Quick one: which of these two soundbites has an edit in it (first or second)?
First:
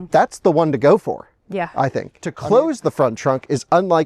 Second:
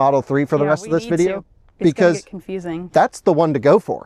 first